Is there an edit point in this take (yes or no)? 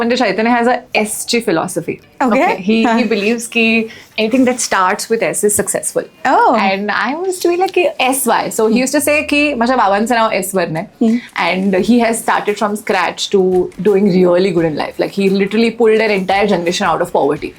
no